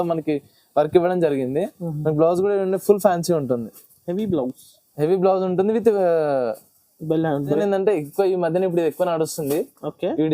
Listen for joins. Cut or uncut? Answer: cut